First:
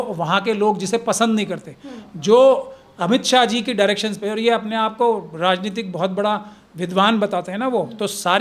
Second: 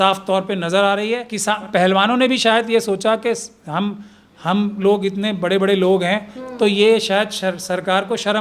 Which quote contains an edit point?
second; 1 cut; at 1.3 s

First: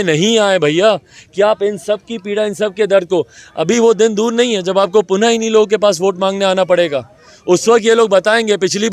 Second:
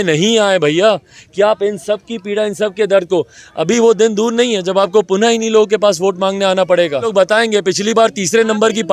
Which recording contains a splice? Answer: second; 1 cut; at 7.1 s

